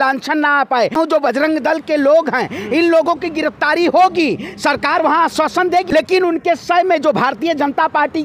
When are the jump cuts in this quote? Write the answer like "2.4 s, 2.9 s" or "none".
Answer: 0.9 s, 5.9 s